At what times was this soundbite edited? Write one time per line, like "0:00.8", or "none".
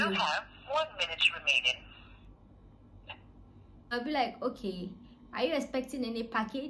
0:03.9

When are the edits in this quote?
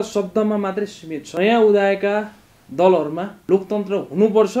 0:01.3

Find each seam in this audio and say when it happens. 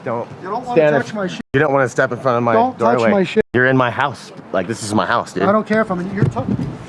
none

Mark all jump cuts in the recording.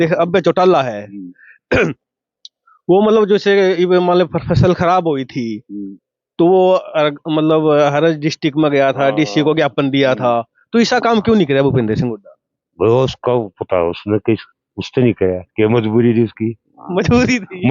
none

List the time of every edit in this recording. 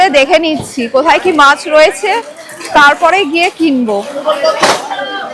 0:04.1

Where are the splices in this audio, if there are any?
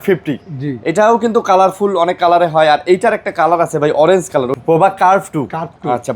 0:04.5

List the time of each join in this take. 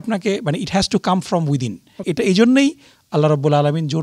0:02.0

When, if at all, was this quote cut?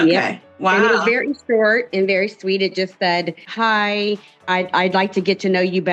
none

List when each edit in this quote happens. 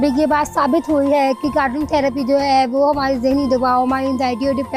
none

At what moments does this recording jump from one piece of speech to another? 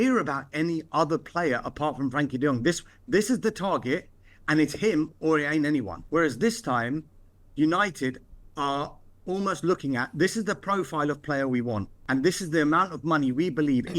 0:06.0
0:11.9

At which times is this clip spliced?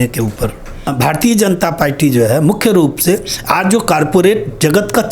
0:00.9

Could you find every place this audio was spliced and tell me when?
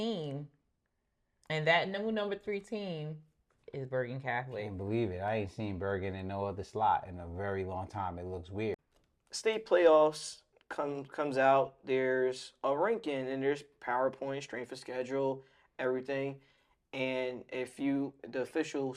0:08.8

